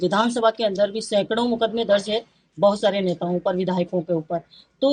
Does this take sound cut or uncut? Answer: uncut